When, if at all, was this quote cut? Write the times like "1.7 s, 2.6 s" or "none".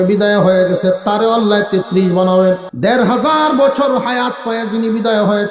2.7 s